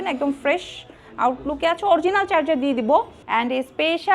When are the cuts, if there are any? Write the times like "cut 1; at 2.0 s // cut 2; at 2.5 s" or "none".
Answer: cut 1; at 3.2 s